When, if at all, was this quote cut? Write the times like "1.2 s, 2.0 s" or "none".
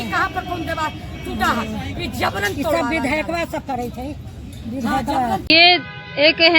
5.5 s